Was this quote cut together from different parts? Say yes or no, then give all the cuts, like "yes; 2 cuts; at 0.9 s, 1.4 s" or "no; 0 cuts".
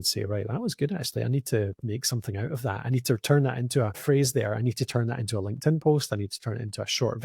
yes; 2 cuts; at 1.8 s, 4.0 s